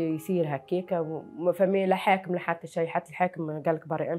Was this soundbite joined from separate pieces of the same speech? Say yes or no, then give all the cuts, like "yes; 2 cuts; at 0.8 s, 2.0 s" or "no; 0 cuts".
no; 0 cuts